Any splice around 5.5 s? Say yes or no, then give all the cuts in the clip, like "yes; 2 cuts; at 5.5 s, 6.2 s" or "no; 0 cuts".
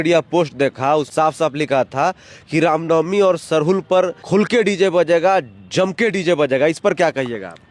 no; 2 cuts; at 1.1 s, 4.2 s